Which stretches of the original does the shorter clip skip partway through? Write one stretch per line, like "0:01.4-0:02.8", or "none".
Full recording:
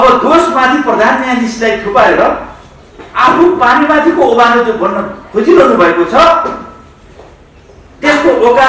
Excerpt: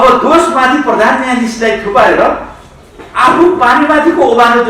none